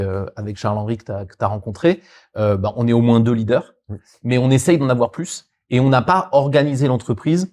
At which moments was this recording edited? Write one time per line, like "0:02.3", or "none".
none